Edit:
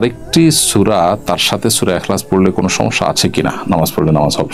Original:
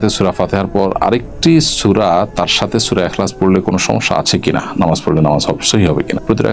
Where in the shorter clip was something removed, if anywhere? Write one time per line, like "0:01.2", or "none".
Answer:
none